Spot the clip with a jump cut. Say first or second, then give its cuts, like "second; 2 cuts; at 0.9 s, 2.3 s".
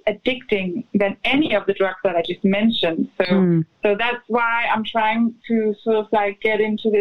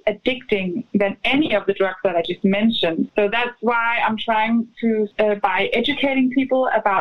second; 2 cuts; at 3.1 s, 5.1 s